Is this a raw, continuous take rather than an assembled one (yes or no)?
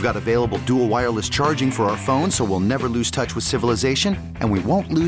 yes